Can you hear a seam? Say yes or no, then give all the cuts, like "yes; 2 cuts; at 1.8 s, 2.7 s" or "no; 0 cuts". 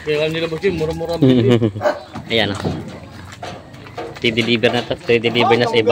yes; 1 cut; at 2.1 s